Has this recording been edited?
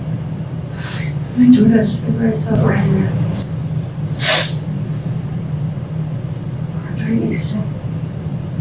no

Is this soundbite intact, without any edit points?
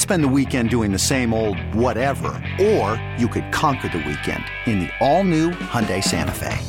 yes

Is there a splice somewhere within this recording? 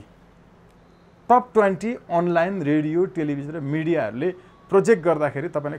no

